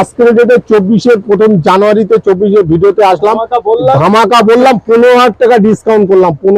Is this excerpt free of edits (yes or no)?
yes